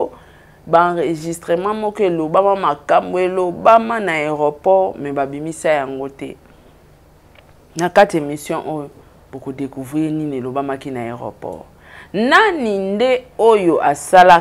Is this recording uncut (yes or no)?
yes